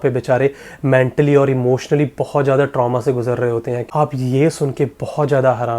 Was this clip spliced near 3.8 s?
yes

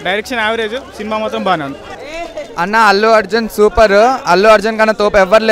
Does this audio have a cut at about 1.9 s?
yes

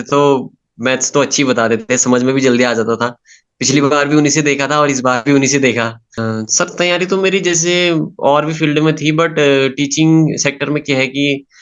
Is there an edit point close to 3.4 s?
no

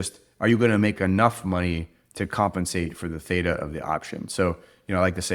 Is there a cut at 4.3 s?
no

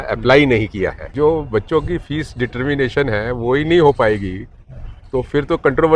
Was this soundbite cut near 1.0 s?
yes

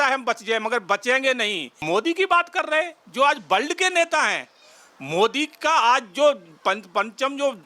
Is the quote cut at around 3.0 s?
no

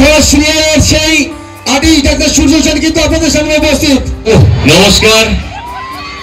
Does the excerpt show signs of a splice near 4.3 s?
yes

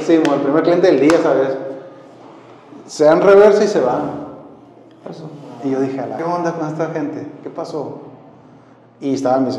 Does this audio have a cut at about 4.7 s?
no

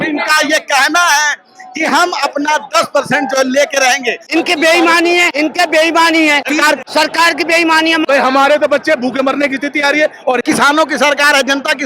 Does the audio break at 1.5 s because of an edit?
no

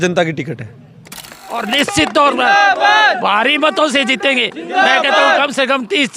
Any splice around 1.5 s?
yes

